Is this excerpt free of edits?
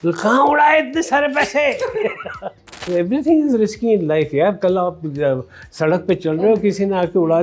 no; 1 cut; at 2.9 s

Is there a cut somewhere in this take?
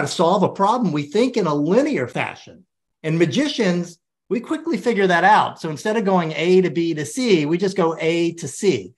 yes; 1 cut; at 2.1 s

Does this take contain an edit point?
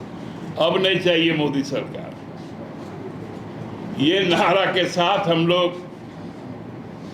no; 0 cuts

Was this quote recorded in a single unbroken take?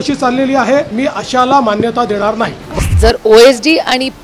no; 2 cuts; at 0.9 s, 2.8 s

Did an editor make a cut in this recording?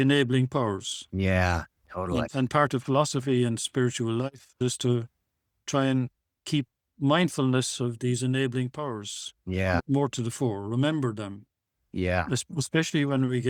no; 0 cuts

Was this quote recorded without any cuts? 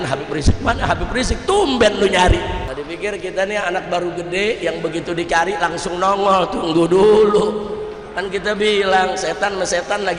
no; 1 cut; at 2.7 s

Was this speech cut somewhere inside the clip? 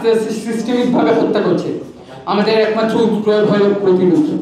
no; 0 cuts

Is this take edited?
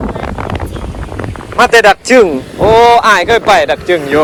no; 0 cuts

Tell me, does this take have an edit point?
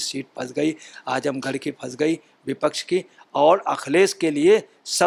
no; 0 cuts

